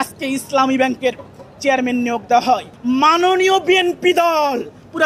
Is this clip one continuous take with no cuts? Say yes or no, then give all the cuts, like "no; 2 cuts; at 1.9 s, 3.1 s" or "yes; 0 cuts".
no; 1 cut; at 2.7 s